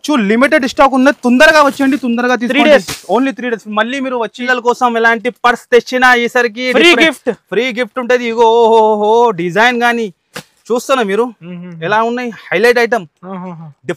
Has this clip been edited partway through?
yes; 1 cut; at 4.4 s

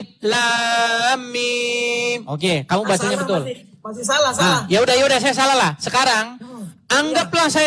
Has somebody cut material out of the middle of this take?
no; 0 cuts

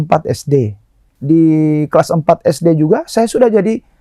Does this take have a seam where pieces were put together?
yes; 1 cut; at 1.1 s

